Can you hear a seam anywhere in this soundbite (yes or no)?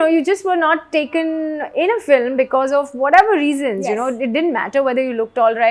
no